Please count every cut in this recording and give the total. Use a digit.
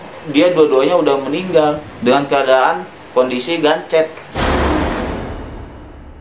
2